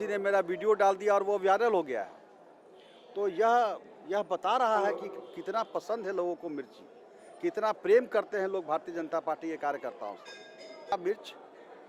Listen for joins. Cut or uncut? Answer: cut